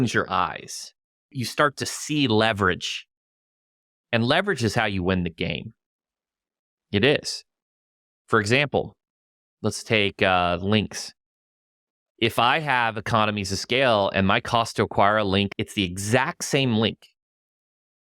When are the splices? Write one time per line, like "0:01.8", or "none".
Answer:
0:01.3
0:15.5